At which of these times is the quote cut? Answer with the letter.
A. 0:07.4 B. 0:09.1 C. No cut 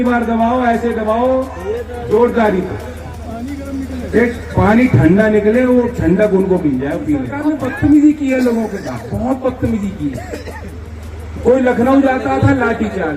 A